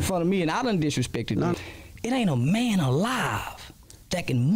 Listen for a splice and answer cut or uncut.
cut